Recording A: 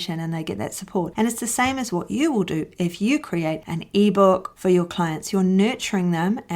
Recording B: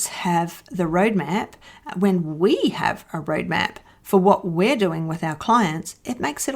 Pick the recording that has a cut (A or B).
A